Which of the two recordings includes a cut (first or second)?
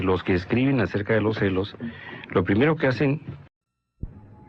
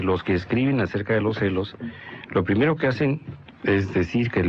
second